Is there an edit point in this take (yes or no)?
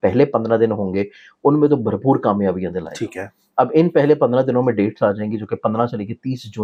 no